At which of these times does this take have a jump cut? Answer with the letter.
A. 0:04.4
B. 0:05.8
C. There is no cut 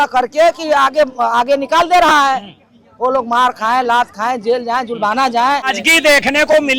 B